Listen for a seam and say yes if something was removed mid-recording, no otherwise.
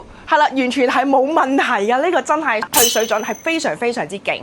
yes